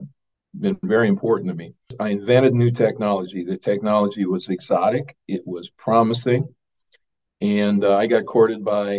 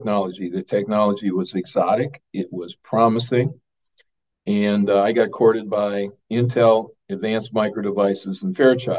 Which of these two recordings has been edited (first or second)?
first